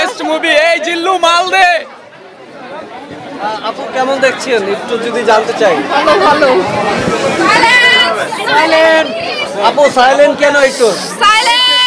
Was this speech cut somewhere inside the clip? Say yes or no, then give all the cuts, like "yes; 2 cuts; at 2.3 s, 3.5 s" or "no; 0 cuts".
no; 0 cuts